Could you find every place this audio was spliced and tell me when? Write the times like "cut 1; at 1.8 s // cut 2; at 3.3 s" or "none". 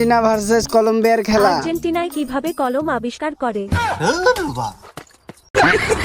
cut 1; at 1.6 s